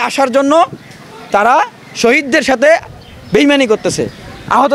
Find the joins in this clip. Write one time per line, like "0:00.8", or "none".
none